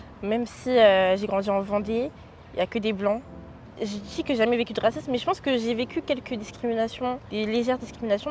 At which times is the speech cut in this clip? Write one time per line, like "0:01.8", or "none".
0:03.8
0:07.2